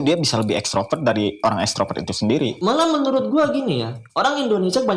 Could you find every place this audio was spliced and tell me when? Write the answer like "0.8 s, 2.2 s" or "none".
2.6 s, 4.0 s